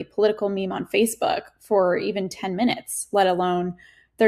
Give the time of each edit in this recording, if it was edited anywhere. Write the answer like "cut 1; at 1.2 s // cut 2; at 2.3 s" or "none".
none

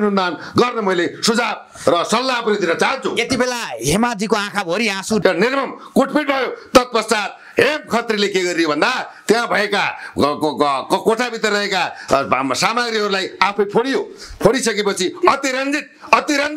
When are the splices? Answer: cut 1; at 5.2 s

